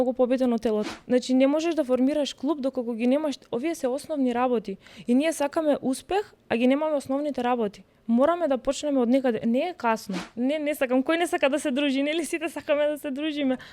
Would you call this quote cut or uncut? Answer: cut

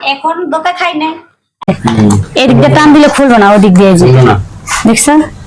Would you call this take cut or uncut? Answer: cut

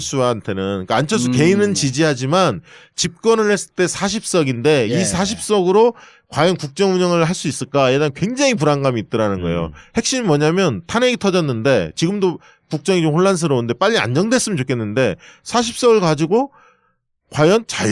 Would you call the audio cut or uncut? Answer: cut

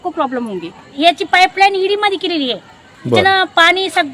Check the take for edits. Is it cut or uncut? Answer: cut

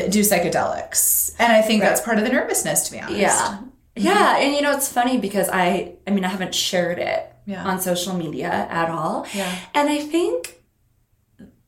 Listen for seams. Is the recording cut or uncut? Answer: uncut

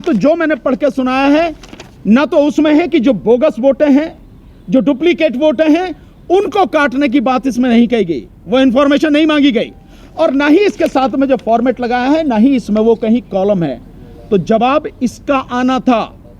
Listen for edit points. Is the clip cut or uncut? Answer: uncut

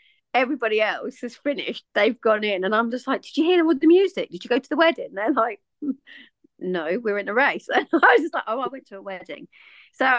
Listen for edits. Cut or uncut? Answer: uncut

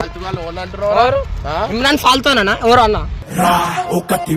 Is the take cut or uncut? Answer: uncut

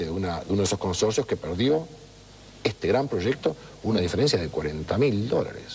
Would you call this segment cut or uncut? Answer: uncut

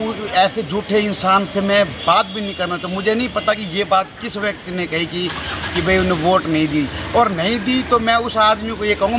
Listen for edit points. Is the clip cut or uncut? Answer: uncut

